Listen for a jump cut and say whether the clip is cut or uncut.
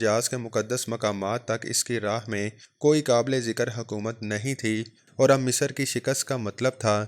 cut